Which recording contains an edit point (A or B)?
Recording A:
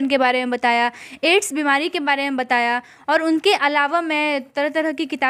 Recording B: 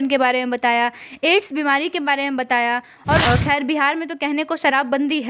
B